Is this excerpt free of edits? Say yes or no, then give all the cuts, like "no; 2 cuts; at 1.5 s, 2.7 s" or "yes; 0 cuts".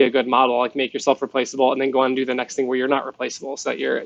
yes; 0 cuts